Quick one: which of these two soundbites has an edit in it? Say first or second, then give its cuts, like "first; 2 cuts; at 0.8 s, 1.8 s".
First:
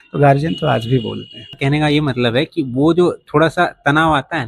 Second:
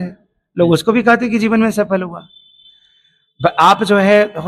first; 1 cut; at 1.6 s